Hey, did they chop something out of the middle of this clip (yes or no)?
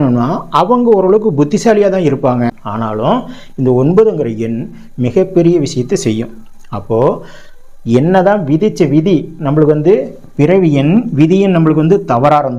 yes